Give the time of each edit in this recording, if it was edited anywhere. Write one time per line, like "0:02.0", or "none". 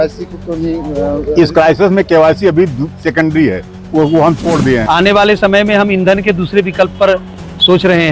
0:04.8